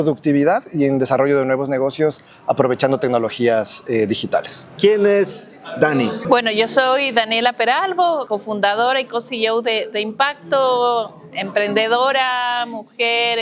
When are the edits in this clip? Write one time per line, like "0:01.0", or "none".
0:04.6
0:06.2
0:08.2